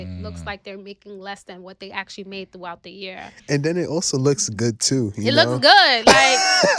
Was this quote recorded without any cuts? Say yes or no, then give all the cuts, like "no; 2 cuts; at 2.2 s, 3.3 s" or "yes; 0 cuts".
yes; 0 cuts